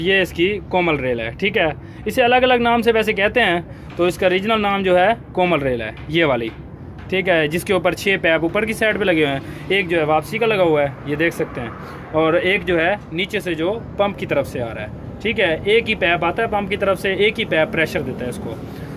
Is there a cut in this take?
no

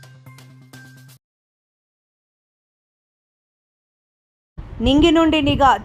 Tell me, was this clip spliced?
no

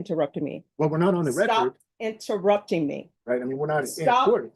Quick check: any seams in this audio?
yes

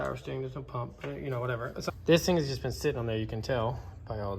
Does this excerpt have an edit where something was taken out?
yes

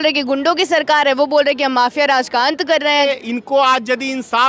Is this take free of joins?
no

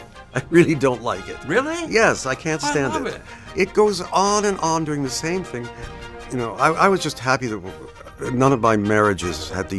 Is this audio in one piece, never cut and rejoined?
no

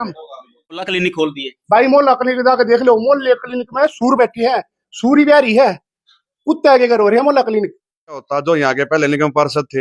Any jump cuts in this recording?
yes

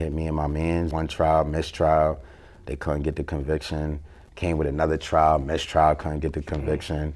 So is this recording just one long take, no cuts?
no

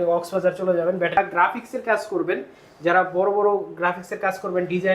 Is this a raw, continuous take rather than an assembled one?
no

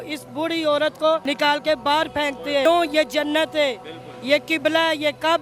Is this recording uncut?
no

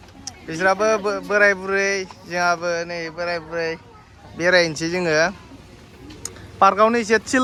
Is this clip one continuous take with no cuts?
yes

